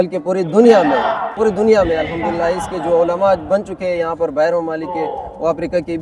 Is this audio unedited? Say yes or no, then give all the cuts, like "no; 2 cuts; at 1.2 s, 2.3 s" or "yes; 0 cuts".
no; 1 cut; at 1.3 s